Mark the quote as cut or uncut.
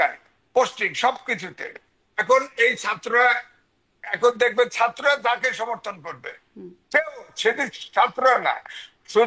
uncut